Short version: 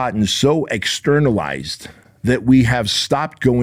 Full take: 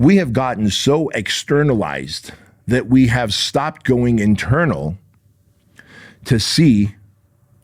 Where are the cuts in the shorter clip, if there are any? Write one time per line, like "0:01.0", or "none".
none